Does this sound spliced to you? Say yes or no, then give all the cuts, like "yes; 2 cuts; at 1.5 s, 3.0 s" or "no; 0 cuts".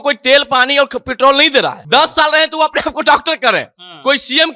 yes; 1 cut; at 1.8 s